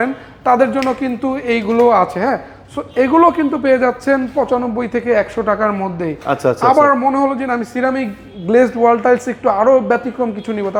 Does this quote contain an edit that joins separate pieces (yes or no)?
no